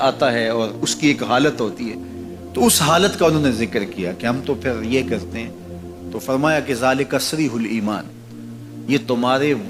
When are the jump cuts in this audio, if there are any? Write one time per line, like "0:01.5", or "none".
none